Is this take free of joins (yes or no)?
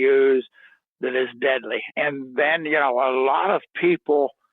no